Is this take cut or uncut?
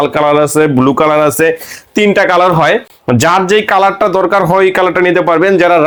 uncut